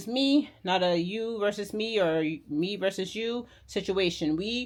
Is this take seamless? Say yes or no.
yes